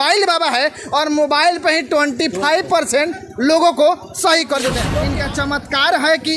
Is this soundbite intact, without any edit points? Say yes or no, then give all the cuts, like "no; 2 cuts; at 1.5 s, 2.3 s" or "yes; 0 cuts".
no; 1 cut; at 4.8 s